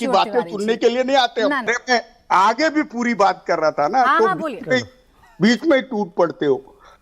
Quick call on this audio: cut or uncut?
cut